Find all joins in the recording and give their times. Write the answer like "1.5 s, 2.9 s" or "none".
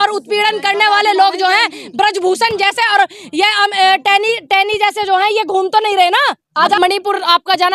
6.8 s